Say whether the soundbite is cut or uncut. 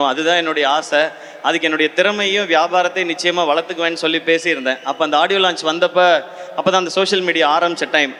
uncut